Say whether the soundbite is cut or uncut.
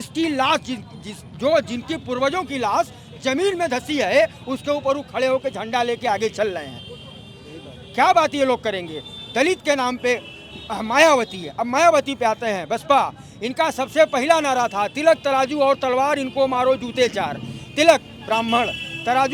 uncut